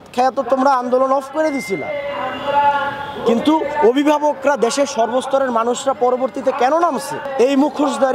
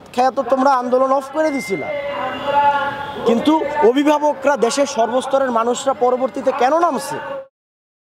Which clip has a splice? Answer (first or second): first